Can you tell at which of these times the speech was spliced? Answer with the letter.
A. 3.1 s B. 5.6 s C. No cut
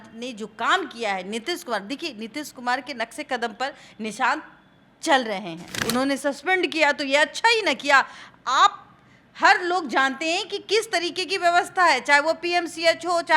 B